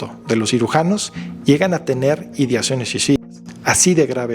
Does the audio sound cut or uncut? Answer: uncut